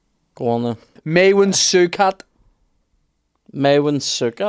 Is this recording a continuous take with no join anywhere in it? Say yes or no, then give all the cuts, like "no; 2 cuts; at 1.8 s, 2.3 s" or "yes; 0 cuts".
no; 1 cut; at 0.9 s